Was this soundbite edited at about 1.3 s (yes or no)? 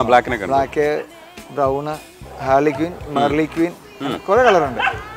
no